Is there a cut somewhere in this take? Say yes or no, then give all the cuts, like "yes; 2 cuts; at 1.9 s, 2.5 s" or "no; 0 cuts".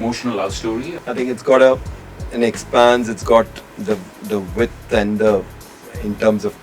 yes; 1 cut; at 0.9 s